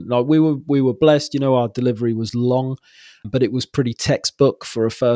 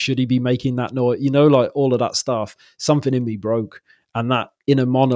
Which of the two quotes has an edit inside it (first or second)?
first